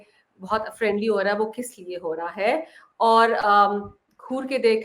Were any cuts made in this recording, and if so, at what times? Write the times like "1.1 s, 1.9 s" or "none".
none